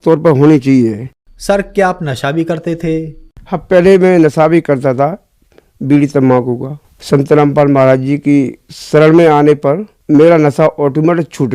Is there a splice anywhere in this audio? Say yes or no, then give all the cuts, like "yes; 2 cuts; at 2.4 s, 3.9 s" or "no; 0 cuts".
no; 0 cuts